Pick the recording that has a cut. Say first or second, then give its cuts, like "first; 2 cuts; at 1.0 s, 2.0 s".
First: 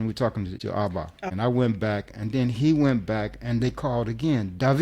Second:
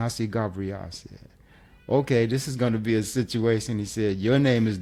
first; 1 cut; at 1.0 s